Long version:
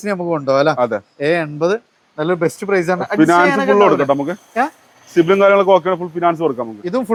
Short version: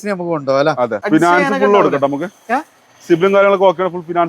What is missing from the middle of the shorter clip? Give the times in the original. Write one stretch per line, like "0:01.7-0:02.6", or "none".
0:01.0-0:03.1